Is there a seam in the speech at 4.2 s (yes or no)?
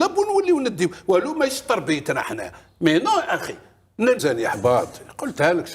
yes